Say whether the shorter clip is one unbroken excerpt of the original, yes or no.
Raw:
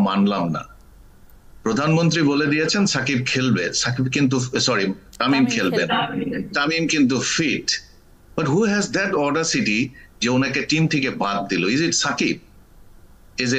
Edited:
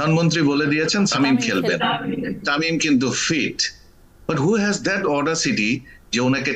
no